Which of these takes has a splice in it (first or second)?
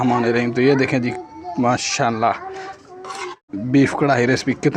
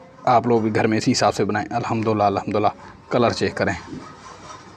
first